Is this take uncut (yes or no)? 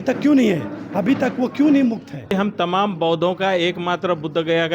no